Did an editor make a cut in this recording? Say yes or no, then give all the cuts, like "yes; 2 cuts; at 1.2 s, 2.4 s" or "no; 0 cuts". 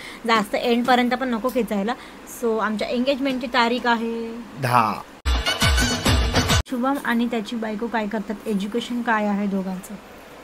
yes; 2 cuts; at 5.1 s, 6.6 s